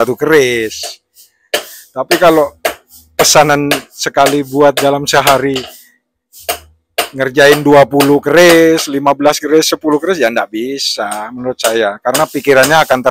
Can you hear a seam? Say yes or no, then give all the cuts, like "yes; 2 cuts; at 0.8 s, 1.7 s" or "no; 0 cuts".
no; 0 cuts